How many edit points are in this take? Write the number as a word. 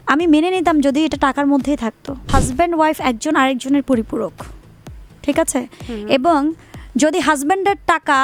one